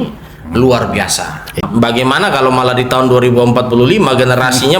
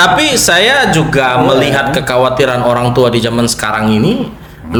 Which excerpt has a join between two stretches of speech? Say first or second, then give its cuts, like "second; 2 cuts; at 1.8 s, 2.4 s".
first; 1 cut; at 1.6 s